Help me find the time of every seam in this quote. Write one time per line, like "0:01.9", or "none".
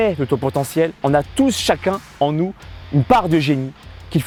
none